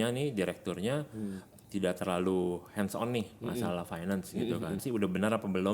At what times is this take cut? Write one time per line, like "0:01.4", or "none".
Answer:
0:04.8